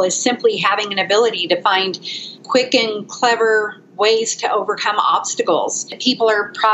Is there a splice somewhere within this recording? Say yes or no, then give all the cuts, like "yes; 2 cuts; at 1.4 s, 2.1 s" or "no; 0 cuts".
yes; 2 cuts; at 2.4 s, 5.9 s